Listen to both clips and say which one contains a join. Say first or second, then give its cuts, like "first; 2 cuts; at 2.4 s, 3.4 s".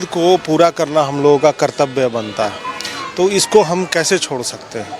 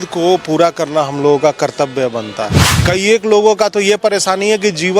second; 1 cut; at 2.7 s